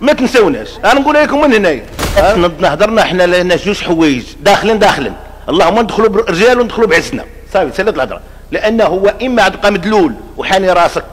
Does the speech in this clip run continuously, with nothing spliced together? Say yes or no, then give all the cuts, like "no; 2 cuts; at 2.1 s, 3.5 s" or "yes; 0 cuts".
no; 1 cut; at 2.4 s